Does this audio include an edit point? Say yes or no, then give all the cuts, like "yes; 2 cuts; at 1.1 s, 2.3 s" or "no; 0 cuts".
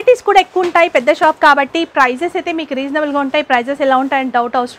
no; 0 cuts